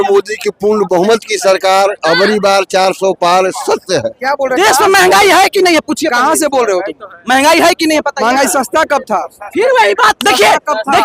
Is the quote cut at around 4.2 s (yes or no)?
yes